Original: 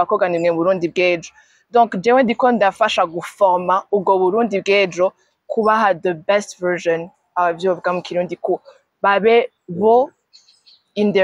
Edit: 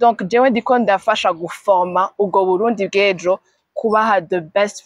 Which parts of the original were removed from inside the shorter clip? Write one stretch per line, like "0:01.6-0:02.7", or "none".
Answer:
none